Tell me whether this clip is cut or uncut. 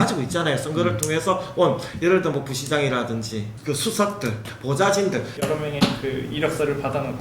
cut